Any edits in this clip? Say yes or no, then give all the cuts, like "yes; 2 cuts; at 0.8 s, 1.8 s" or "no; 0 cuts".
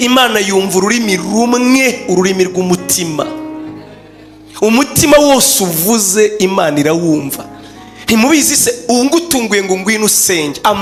no; 0 cuts